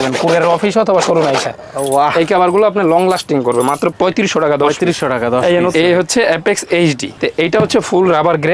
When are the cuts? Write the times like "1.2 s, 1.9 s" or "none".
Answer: 5.7 s, 7.1 s